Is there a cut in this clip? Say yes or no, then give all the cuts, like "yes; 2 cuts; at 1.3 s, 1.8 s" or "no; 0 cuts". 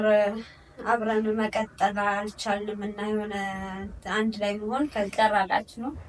yes; 1 cut; at 4.9 s